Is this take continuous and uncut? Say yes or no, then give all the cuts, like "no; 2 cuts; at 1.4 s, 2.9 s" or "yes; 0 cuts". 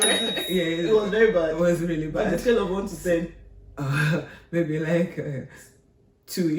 yes; 0 cuts